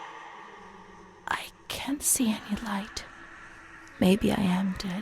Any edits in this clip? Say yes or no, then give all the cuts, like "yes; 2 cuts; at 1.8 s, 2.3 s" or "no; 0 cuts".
yes; 1 cut; at 1.2 s